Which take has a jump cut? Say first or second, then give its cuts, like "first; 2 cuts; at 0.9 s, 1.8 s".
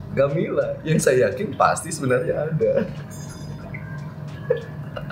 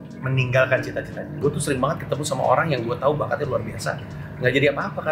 second; 1 cut; at 1.3 s